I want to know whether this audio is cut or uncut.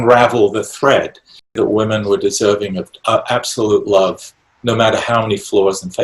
cut